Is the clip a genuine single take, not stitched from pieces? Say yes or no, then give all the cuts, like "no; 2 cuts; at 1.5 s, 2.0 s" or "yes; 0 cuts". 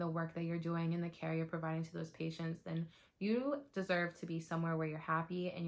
yes; 0 cuts